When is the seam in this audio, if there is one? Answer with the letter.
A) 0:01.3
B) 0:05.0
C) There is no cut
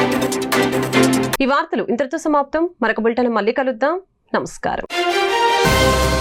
C